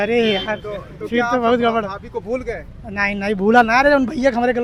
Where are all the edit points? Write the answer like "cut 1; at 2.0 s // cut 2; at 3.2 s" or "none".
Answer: none